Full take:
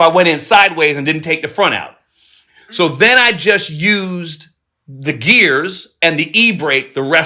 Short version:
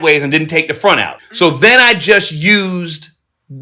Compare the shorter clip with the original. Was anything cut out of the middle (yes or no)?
yes